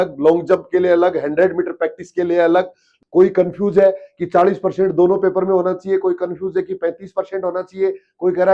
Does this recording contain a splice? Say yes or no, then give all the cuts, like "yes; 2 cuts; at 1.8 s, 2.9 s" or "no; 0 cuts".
yes; 1 cut; at 2.9 s